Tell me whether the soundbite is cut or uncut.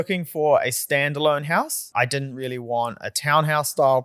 cut